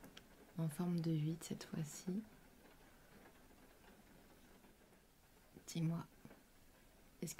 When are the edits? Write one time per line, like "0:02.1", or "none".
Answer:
0:05.0